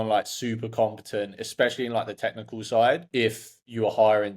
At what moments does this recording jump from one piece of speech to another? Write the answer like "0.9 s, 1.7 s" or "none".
3.0 s

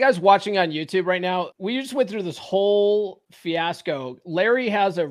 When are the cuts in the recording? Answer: 1.5 s, 3.2 s

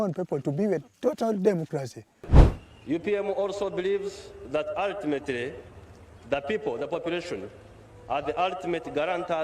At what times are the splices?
2.2 s

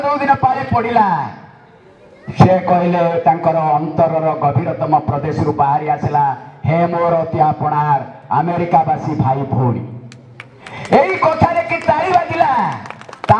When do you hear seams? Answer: none

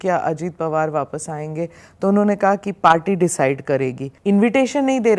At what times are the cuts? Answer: 4.1 s

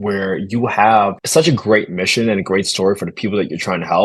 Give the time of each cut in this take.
1.2 s

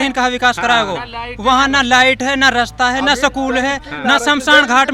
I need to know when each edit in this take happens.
none

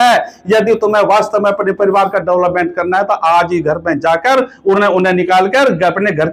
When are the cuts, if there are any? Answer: none

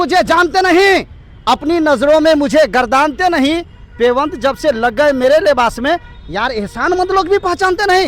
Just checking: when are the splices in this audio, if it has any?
none

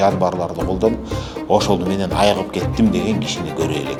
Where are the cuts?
none

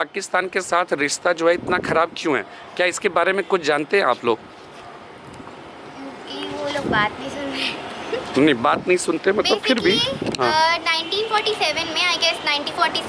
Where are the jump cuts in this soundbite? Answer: none

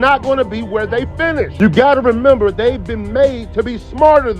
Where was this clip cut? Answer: 2.0 s, 3.6 s

